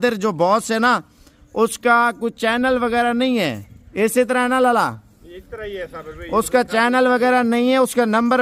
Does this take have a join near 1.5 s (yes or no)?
no